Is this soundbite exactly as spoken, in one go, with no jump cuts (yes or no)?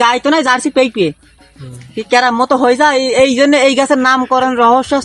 yes